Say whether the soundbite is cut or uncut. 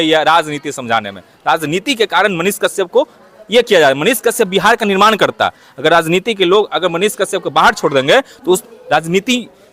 uncut